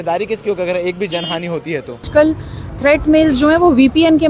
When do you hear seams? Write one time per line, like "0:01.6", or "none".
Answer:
0:02.1